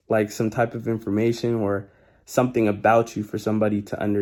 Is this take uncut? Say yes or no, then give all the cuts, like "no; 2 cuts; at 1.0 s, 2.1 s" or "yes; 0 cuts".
yes; 0 cuts